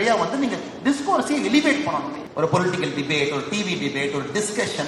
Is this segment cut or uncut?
cut